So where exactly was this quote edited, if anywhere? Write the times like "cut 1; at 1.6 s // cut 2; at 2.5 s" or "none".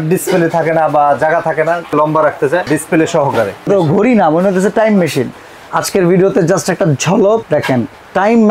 cut 1; at 1.9 s // cut 2; at 2.7 s // cut 3; at 3.7 s // cut 4; at 5.4 s // cut 5; at 7.4 s